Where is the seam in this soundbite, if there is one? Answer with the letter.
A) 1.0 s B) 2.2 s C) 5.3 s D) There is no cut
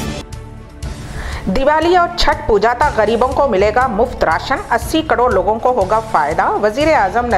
A